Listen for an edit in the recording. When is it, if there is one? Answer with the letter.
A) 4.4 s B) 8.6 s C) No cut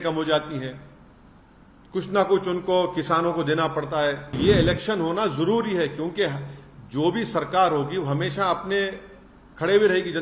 A